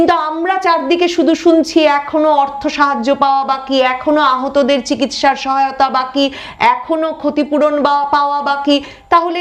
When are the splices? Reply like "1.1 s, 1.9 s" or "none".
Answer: none